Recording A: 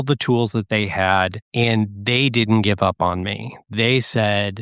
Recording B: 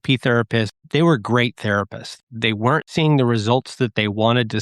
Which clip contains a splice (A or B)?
B